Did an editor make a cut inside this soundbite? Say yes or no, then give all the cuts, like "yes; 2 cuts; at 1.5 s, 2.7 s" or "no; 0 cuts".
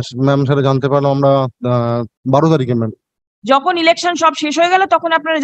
yes; 1 cut; at 2.1 s